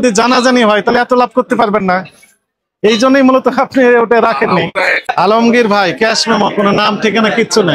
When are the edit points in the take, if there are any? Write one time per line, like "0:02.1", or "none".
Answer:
0:05.0

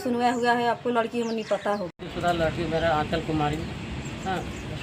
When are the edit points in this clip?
0:02.0

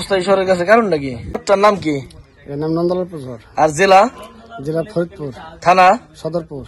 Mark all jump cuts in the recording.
0:01.4

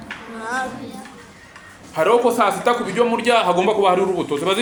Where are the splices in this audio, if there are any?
none

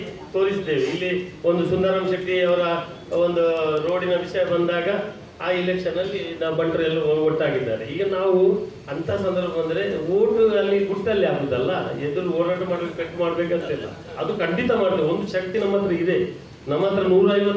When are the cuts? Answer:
none

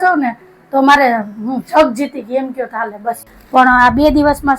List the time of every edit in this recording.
0:03.3

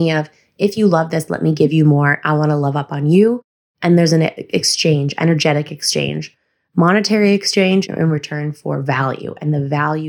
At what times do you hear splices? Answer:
0:07.9

